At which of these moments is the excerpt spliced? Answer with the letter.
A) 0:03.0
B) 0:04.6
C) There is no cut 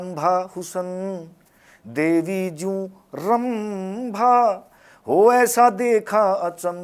C